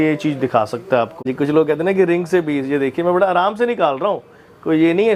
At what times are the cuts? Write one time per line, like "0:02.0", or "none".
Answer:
0:01.3